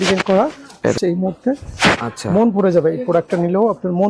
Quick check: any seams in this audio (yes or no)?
yes